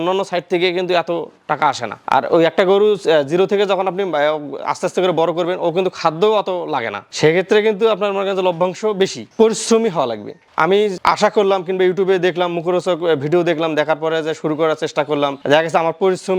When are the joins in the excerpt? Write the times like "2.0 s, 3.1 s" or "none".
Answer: 9.2 s